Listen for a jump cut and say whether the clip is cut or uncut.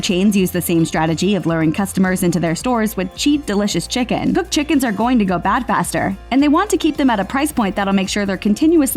cut